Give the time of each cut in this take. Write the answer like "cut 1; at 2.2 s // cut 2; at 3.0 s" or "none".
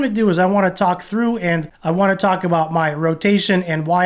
cut 1; at 1.7 s